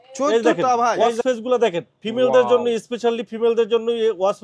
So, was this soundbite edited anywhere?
yes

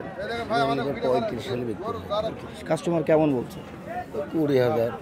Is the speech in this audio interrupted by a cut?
no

